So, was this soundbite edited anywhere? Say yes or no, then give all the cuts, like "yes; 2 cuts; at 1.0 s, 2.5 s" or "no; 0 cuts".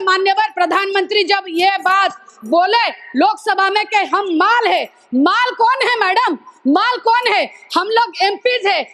no; 0 cuts